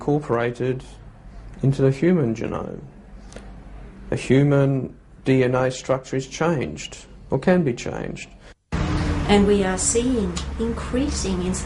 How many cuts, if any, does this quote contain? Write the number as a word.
one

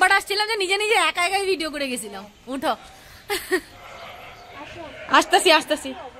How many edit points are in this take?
zero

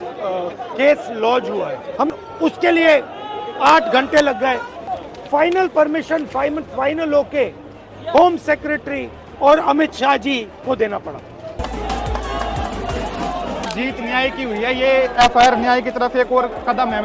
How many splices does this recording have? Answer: three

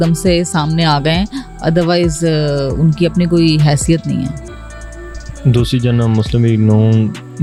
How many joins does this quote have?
zero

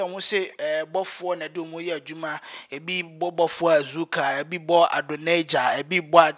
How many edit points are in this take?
zero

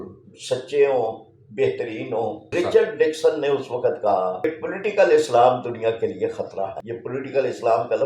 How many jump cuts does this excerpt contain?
three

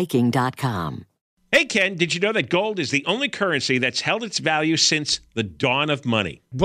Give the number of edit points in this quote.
one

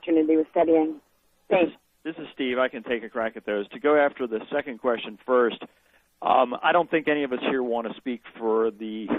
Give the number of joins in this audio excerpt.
one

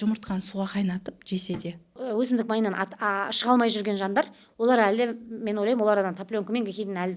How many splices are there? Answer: one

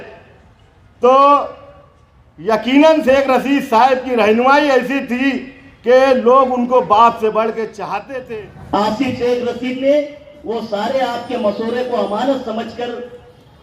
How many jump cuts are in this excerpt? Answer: one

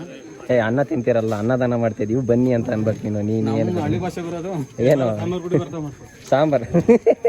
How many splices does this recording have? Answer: zero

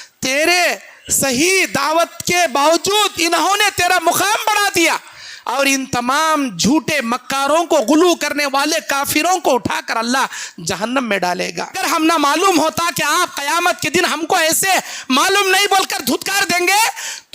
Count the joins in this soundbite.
one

